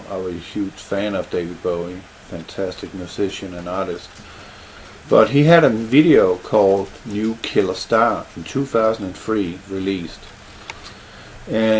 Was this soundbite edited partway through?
yes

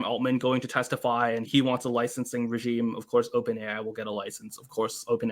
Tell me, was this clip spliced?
yes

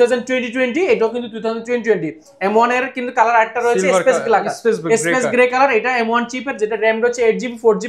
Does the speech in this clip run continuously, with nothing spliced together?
yes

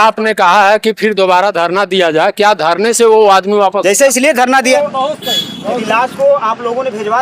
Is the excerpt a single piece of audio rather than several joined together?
no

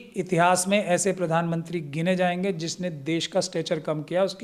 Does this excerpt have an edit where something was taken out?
no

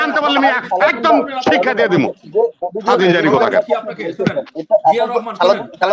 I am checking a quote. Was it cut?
no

